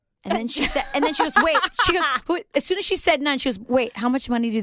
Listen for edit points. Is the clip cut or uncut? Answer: uncut